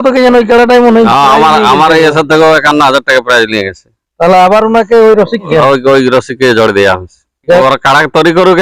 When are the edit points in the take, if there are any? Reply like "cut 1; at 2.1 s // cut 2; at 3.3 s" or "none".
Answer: cut 1; at 5.5 s // cut 2; at 7.6 s